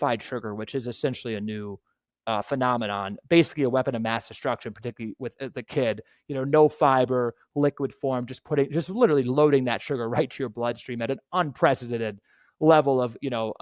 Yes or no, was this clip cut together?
no